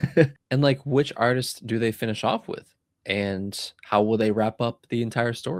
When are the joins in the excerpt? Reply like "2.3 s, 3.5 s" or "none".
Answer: none